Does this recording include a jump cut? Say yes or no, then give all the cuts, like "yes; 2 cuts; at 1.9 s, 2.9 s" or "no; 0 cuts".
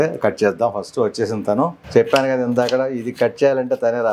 yes; 1 cut; at 1.8 s